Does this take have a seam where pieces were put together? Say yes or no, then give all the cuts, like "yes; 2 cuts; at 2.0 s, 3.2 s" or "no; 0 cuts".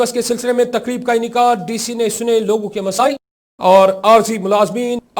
yes; 1 cut; at 3.0 s